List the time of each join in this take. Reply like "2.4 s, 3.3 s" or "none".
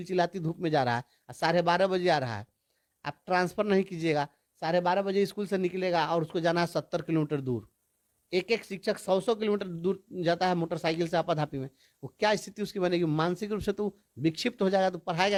none